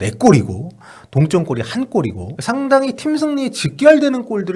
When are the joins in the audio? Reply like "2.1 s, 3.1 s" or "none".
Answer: 2.3 s